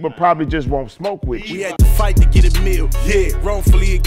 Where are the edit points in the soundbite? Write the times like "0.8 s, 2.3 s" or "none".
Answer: 1.5 s